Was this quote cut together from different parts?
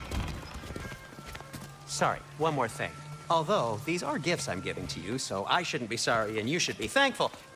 no; 0 cuts

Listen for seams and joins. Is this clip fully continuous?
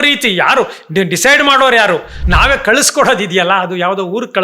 no; 1 cut; at 2.2 s

